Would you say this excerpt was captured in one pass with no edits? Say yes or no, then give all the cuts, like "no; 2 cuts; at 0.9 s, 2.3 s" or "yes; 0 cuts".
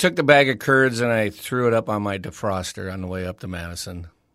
yes; 0 cuts